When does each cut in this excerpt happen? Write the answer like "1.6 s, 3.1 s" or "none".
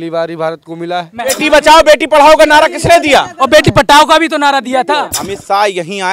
1.1 s, 5.2 s